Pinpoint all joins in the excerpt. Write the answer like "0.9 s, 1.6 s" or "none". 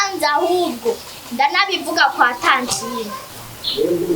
3.3 s